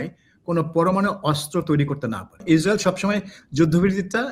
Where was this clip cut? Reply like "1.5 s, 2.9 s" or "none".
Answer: 2.4 s